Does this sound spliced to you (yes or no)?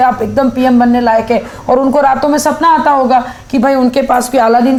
no